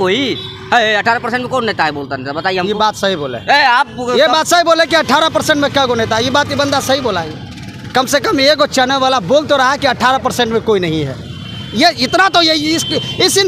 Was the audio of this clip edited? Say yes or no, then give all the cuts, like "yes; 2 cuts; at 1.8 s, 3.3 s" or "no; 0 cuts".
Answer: no; 0 cuts